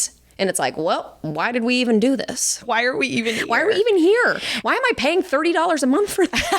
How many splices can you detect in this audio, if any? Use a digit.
1